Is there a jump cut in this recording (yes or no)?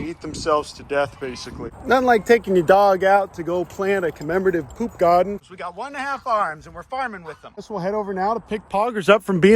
yes